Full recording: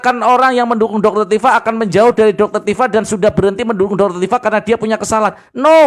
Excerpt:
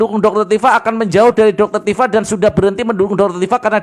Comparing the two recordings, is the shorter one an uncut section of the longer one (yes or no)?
yes